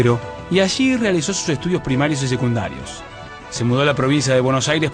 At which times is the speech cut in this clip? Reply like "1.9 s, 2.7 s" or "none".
none